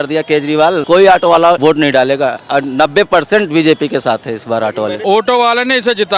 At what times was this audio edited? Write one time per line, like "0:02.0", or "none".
0:00.8
0:01.6
0:05.0